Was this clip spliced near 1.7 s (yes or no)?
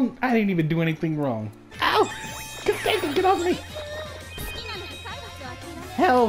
yes